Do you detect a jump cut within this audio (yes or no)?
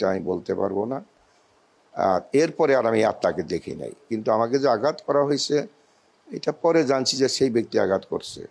no